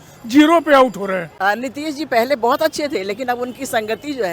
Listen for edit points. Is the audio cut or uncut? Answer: cut